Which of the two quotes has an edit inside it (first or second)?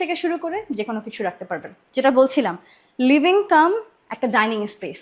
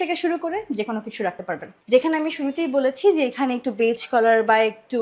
second